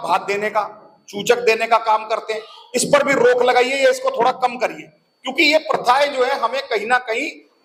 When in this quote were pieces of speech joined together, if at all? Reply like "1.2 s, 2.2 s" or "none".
none